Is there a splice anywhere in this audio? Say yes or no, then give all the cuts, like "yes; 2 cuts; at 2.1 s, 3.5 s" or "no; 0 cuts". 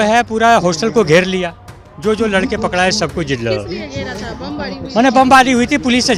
no; 0 cuts